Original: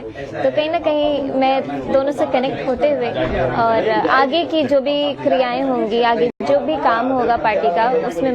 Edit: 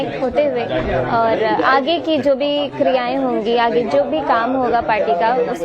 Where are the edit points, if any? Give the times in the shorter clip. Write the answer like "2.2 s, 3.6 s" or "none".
3.9 s